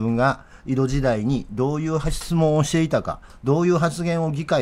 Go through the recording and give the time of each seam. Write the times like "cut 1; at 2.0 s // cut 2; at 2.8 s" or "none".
none